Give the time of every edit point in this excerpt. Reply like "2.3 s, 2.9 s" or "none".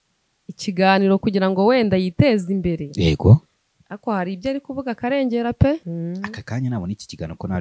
5.9 s